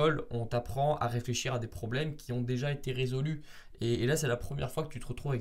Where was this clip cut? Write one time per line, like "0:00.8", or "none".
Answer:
none

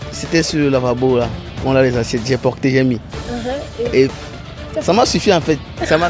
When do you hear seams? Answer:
none

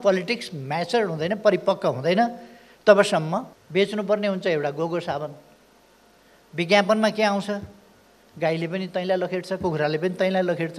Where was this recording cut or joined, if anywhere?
0:03.5

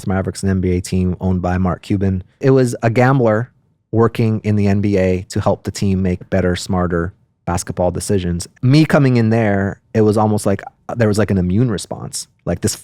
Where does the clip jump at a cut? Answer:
0:02.4
0:08.5

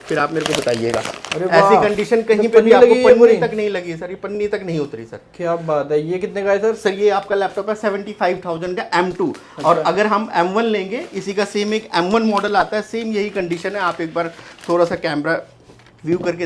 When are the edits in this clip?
none

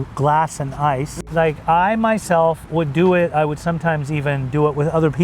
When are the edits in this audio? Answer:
0:01.1

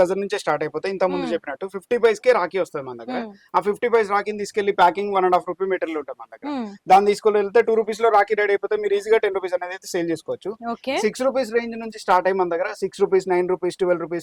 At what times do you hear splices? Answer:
none

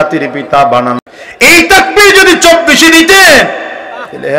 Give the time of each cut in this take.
0:01.0

